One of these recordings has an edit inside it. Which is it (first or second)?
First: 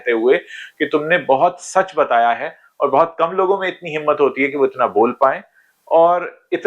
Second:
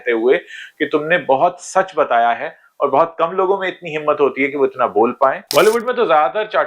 second